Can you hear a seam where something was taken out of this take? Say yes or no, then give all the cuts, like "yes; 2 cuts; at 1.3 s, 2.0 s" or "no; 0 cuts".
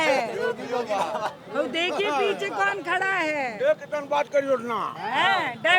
no; 0 cuts